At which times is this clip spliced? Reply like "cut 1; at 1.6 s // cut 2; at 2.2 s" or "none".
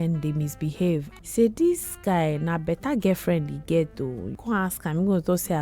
cut 1; at 1.1 s // cut 2; at 4.3 s